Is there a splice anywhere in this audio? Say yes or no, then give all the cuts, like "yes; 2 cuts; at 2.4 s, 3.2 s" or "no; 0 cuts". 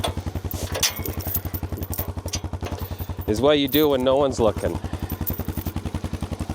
no; 0 cuts